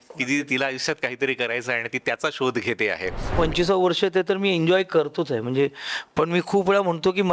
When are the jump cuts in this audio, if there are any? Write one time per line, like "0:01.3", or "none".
0:03.3